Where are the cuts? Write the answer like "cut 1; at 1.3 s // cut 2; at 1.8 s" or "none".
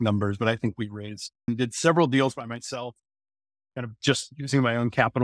cut 1; at 1.5 s